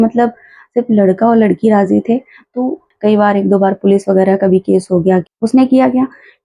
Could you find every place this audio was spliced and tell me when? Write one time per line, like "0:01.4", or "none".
0:02.9
0:05.3